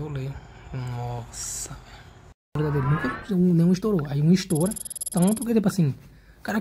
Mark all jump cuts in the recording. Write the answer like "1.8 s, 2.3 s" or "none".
none